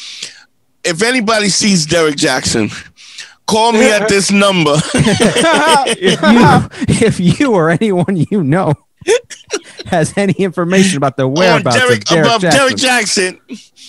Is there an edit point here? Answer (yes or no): no